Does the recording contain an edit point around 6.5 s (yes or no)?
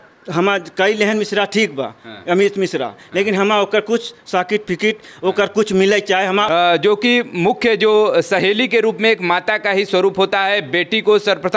yes